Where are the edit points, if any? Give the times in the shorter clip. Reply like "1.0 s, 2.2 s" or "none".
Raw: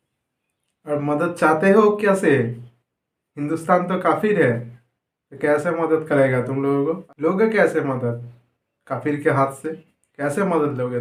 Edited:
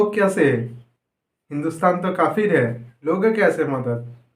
2.9 s